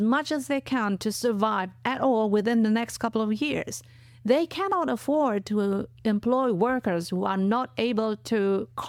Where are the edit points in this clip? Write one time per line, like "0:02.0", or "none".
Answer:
none